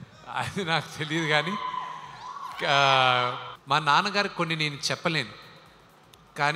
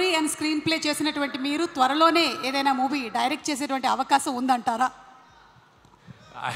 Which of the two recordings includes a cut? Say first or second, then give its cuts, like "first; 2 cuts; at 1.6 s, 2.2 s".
first; 1 cut; at 3.5 s